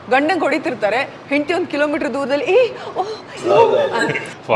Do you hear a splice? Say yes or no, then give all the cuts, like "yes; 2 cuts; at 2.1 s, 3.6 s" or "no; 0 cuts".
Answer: no; 0 cuts